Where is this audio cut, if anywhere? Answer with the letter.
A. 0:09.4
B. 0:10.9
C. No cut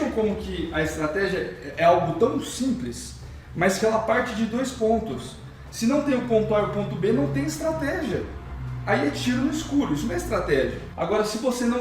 B